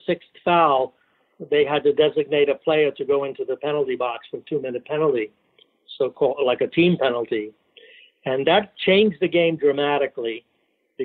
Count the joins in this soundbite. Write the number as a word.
zero